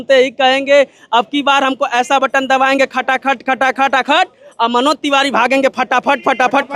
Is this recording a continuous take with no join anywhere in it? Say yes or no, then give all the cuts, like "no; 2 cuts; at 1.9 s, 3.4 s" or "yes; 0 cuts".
yes; 0 cuts